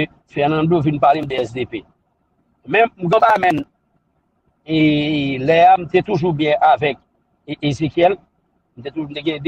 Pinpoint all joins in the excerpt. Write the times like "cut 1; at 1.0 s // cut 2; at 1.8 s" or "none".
none